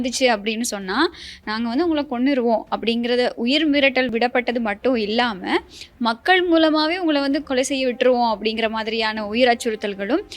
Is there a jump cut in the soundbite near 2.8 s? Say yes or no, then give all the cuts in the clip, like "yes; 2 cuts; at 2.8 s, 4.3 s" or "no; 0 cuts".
no; 2 cuts; at 4.1 s, 7.4 s